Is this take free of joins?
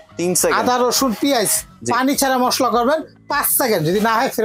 yes; 0 cuts

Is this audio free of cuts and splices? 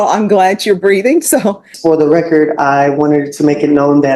no; 1 cut; at 1.7 s

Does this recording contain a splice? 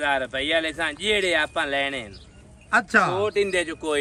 no; 0 cuts

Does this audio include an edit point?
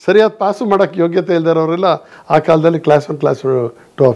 no; 0 cuts

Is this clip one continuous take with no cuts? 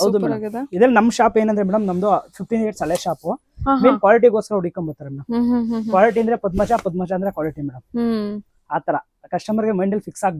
yes; 0 cuts

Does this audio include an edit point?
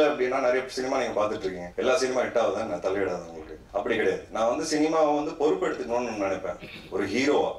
no; 0 cuts

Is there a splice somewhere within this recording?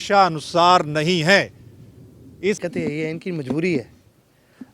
yes; 1 cut; at 2.6 s

